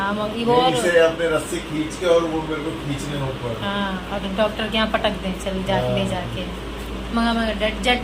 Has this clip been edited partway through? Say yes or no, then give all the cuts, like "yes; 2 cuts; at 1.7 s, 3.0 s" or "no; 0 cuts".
no; 0 cuts